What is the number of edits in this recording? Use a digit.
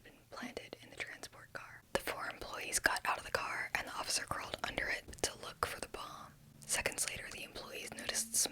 2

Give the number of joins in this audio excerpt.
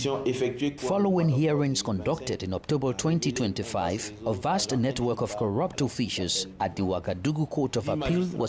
0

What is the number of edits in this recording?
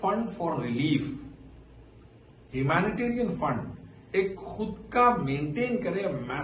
0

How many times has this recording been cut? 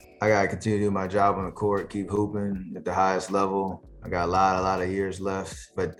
0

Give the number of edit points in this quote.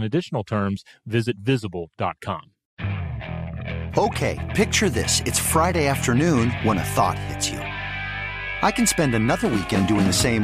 1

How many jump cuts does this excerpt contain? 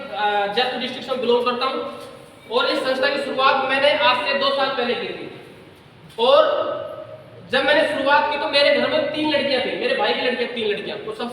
0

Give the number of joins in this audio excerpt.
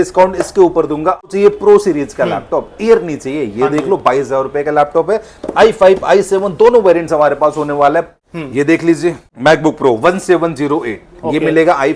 3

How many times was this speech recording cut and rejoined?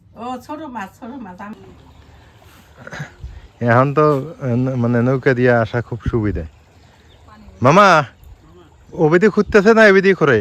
1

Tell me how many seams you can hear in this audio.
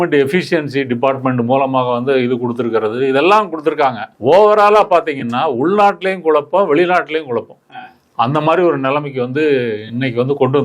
1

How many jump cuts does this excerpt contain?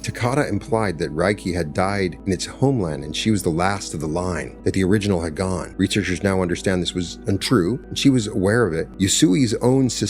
5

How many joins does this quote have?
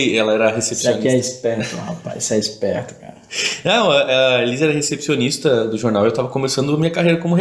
0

